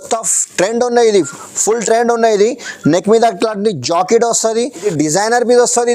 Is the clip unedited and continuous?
no; 1 cut; at 4.9 s

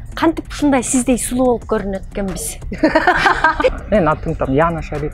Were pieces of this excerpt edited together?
yes; 1 cut; at 3.7 s

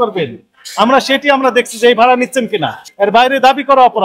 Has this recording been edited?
yes; 1 cut; at 2.8 s

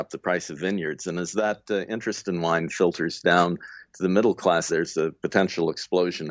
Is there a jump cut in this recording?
yes; 1 cut; at 4.7 s

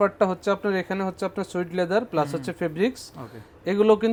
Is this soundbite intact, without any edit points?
yes; 0 cuts

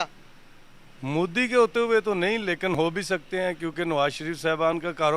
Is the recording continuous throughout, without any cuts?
yes; 0 cuts

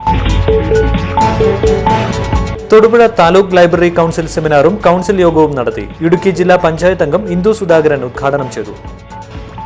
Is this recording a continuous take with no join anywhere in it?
yes; 0 cuts

